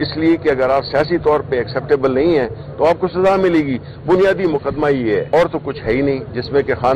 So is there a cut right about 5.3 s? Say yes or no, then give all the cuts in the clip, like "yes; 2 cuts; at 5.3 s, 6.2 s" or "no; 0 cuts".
yes; 1 cut; at 5.3 s